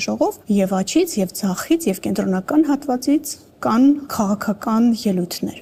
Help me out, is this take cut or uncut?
uncut